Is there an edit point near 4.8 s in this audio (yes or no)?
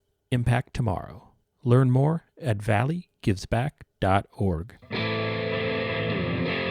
yes